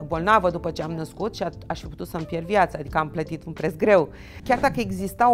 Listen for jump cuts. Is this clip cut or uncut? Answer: cut